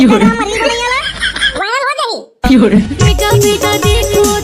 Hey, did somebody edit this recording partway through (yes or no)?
yes